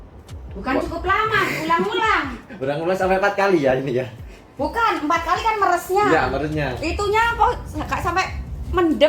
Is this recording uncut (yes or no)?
yes